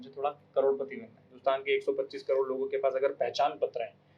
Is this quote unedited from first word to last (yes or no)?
no